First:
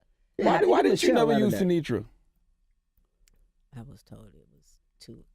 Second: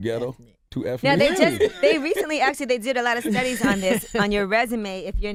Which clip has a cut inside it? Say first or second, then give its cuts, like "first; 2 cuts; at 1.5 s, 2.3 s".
first; 1 cut; at 3.0 s